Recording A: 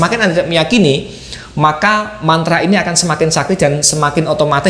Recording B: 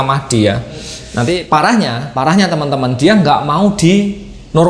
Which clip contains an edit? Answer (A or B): B